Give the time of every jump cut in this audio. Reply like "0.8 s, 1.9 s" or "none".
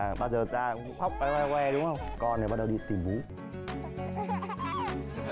2.1 s, 3.3 s